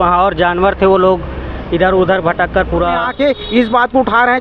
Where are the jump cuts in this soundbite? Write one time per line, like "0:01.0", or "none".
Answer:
0:03.1